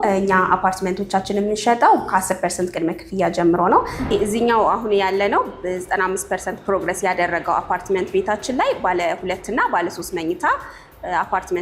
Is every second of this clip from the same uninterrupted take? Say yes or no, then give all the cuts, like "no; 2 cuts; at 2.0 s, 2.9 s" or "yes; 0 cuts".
no; 1 cut; at 4.1 s